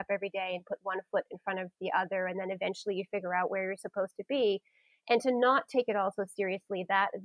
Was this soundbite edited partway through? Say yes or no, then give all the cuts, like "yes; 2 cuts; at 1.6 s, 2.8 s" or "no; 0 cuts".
no; 0 cuts